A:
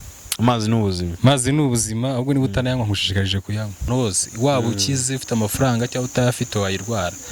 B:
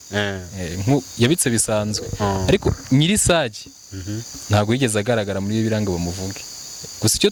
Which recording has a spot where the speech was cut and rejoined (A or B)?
A